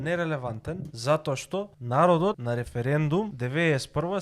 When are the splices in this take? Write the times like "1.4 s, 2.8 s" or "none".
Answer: 0.9 s, 1.8 s, 2.4 s, 3.4 s

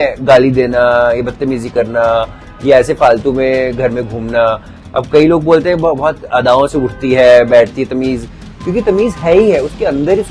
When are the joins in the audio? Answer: none

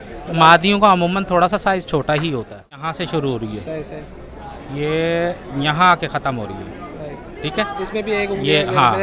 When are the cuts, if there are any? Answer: 2.8 s

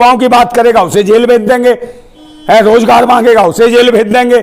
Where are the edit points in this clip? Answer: none

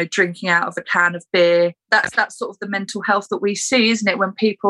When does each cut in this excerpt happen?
1.8 s

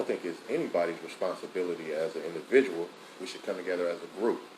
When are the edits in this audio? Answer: 3.1 s

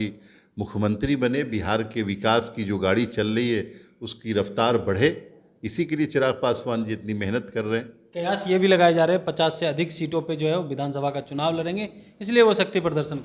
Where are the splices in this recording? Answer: 8.0 s

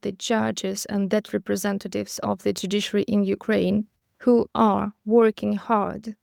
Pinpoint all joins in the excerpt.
none

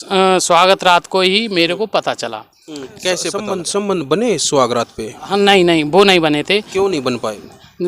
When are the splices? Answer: 3.6 s

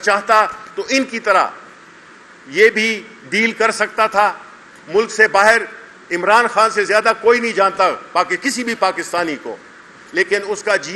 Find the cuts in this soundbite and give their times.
none

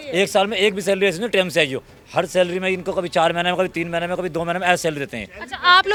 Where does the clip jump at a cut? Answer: none

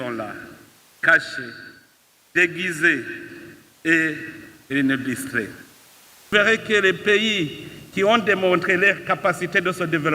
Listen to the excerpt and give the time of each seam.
6.3 s

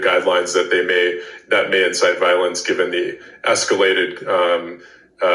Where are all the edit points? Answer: none

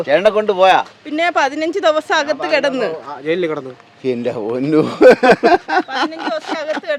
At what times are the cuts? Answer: none

